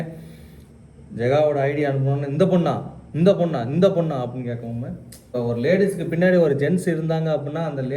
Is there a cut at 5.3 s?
yes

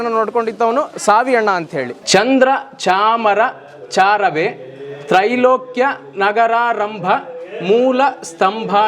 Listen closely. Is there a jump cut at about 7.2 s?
no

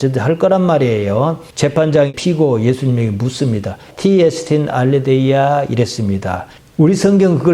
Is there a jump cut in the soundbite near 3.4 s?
no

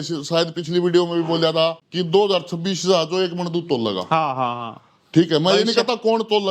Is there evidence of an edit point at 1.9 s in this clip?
yes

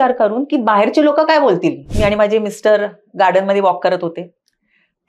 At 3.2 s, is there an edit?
no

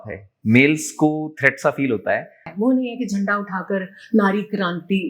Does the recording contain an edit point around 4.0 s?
no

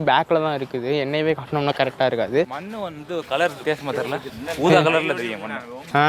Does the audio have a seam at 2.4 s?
yes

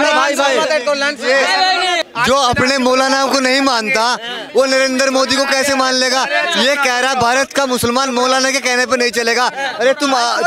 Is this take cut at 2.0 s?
yes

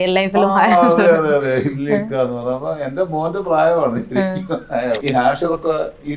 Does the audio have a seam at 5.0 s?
yes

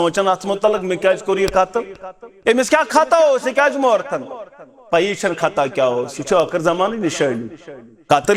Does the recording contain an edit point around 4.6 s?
no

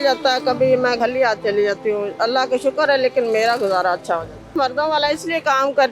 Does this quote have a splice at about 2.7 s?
no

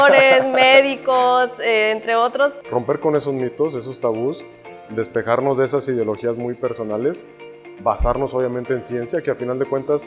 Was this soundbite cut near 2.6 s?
yes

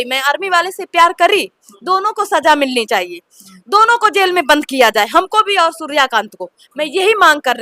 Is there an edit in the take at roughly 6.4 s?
no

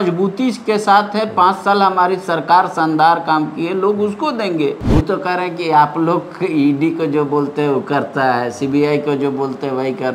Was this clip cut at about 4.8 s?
yes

